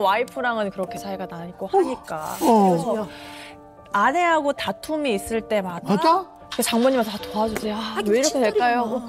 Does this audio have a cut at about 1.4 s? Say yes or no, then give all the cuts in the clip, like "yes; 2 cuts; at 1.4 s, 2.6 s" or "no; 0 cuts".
no; 0 cuts